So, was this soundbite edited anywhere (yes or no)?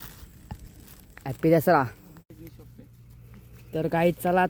yes